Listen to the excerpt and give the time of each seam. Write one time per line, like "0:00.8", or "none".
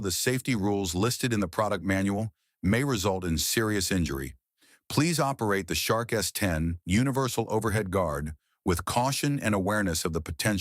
0:06.8